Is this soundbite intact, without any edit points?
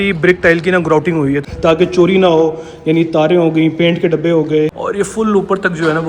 no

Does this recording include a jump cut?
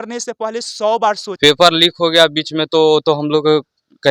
yes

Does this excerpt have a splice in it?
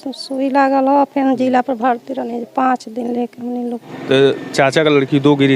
yes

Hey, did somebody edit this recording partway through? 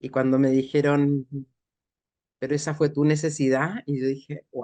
no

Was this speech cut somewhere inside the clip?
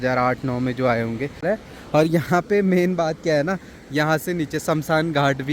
yes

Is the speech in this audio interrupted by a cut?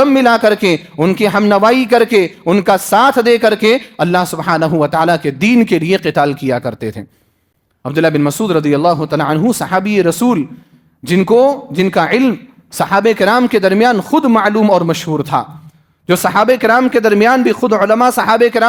no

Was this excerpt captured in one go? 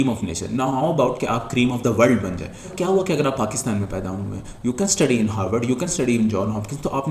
no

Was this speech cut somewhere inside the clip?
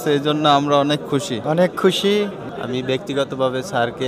yes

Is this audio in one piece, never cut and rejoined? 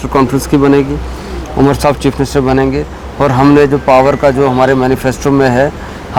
yes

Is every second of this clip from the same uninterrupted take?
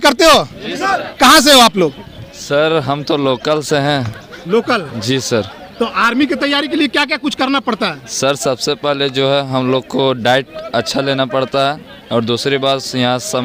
yes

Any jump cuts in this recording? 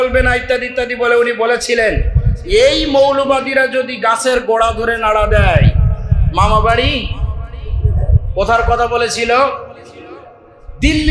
no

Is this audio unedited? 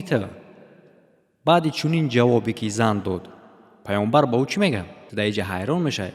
no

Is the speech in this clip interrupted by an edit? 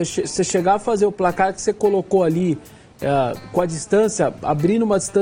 no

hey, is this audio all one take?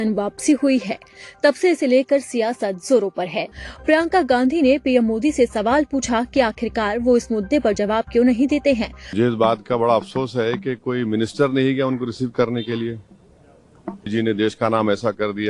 no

